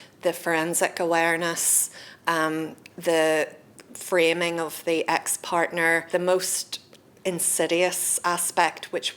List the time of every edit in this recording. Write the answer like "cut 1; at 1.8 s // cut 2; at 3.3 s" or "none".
cut 1; at 6.0 s